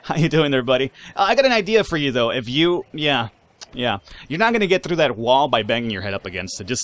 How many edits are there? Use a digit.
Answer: 0